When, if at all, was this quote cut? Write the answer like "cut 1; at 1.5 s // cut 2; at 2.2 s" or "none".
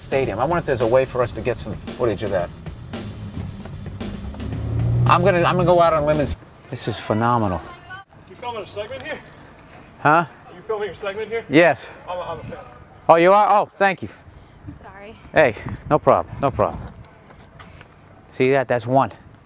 none